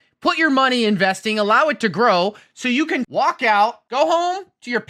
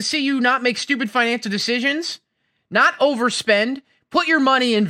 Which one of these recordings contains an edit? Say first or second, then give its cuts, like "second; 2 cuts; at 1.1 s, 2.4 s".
first; 2 cuts; at 3.1 s, 3.8 s